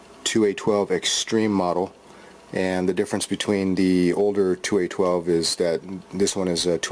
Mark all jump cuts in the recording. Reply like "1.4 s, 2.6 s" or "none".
5.7 s